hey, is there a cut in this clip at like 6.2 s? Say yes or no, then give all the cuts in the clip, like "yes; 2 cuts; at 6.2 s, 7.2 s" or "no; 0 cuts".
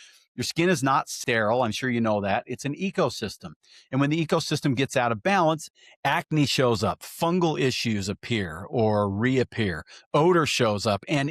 no; 1 cut; at 1.1 s